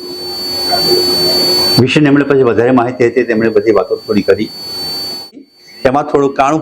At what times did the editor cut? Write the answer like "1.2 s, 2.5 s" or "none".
5.5 s